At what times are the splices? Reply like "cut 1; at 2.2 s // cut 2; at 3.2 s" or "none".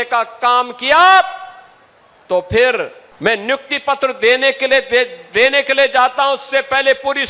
cut 1; at 3.0 s